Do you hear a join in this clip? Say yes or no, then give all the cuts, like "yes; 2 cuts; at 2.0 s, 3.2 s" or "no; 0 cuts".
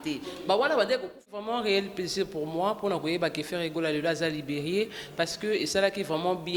yes; 1 cut; at 1.5 s